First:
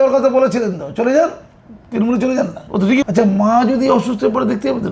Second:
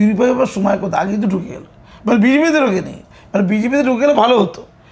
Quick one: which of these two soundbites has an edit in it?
first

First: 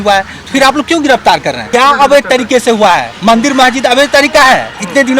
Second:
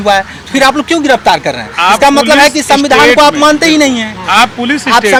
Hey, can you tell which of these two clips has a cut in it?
first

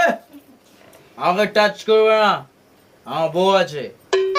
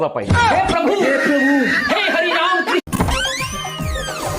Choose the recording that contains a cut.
second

